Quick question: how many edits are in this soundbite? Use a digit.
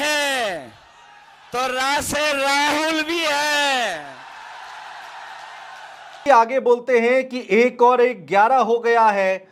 0